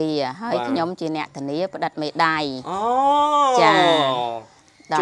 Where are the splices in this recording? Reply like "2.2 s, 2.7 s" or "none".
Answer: none